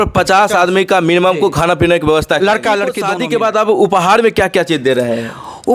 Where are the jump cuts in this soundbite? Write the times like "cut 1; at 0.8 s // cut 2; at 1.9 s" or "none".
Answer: cut 1; at 3.0 s